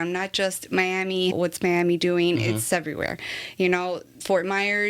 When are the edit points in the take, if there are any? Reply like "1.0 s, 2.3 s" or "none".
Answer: 1.3 s, 2.7 s